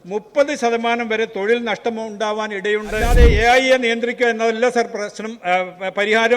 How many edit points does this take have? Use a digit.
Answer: 1